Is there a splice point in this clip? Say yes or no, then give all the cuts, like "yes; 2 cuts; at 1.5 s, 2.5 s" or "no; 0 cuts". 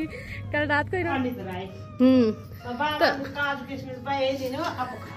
yes; 1 cut; at 1.1 s